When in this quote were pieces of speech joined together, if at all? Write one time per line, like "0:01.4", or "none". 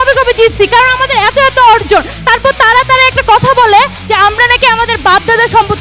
none